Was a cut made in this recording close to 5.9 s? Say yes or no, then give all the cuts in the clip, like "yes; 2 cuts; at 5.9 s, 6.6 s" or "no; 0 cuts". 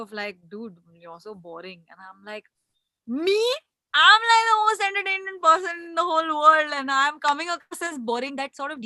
no; 0 cuts